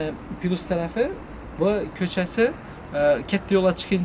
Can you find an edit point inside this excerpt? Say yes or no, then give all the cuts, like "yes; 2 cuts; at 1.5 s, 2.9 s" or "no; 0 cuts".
no; 0 cuts